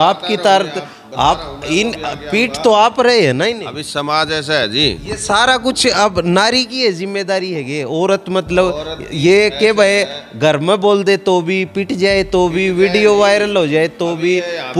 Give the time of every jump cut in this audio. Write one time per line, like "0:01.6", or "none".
none